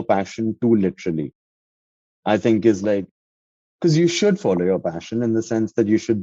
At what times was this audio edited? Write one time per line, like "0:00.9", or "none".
0:03.3